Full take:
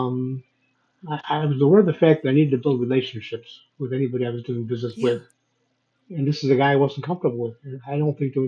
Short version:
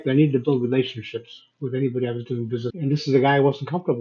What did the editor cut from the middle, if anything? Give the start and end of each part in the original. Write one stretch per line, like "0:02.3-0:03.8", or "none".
0:04.9-0:06.1

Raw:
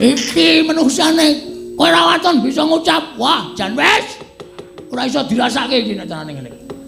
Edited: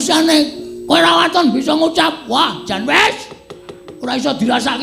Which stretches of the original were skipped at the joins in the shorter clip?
none

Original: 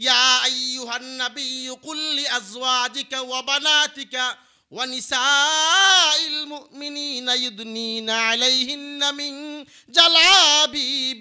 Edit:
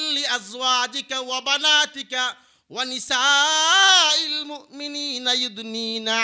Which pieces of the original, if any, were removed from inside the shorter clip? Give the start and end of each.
none

